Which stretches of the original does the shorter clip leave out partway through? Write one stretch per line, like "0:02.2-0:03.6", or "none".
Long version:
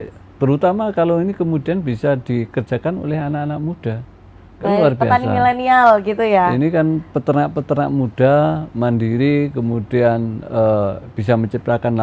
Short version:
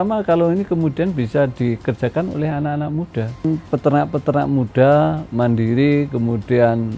0:04.2-0:06.9